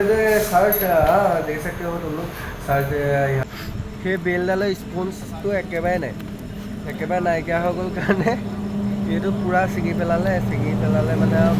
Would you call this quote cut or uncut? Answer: cut